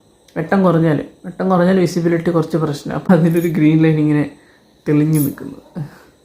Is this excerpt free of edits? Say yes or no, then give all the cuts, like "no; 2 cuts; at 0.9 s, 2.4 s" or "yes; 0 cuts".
no; 1 cut; at 2.9 s